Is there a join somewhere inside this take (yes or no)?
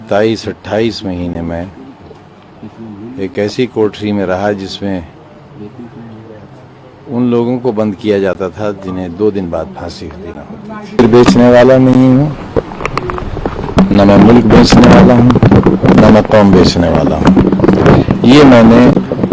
yes